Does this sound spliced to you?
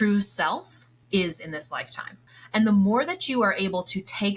yes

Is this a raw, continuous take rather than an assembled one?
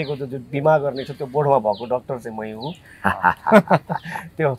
yes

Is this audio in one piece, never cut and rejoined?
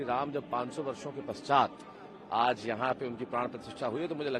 yes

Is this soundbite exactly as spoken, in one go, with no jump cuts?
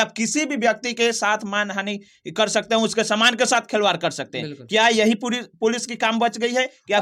yes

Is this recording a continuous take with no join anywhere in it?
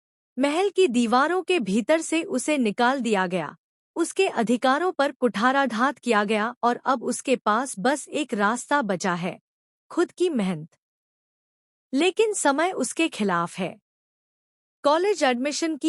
no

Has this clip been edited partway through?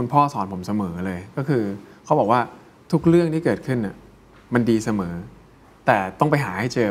no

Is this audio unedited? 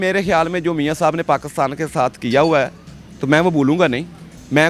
yes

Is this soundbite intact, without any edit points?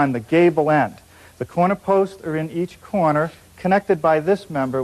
yes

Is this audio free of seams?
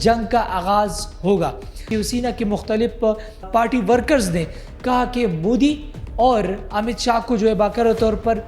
no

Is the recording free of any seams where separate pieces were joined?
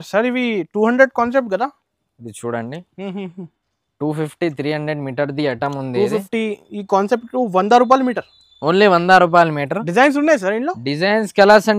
yes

